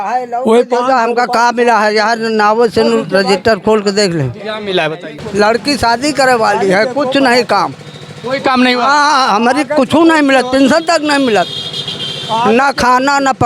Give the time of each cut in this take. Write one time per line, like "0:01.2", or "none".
0:05.2

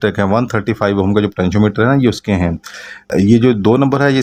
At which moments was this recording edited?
none

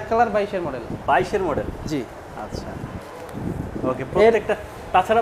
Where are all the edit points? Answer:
none

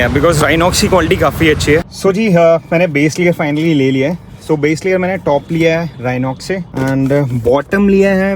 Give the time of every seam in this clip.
0:01.8

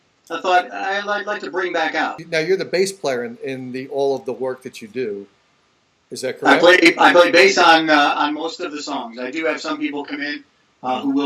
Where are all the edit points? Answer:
0:02.2

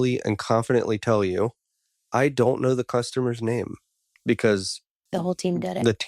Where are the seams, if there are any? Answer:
0:04.0
0:05.0

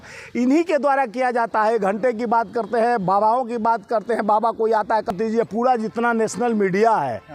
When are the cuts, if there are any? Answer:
0:05.1

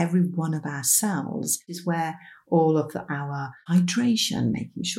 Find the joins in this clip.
0:01.7
0:03.6

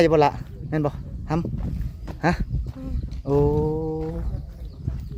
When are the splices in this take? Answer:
none

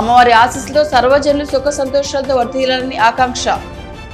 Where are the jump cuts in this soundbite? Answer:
none

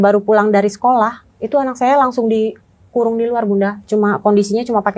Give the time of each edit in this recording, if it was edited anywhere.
none

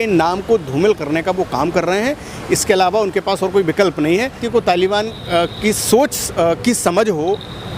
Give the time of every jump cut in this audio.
0:04.4

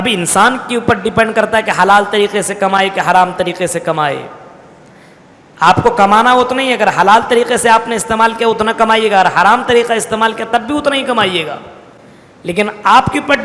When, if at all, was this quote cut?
none

